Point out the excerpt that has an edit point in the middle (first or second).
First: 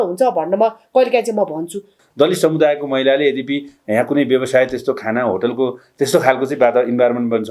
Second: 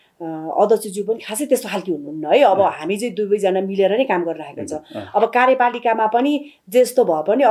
first